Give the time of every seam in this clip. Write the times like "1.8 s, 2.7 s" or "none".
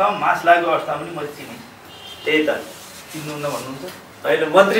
none